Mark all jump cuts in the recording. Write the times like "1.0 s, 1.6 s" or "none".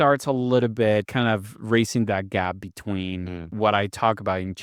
1.1 s, 3.5 s